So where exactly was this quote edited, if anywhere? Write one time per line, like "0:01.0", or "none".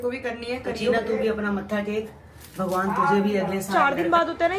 0:00.9
0:03.7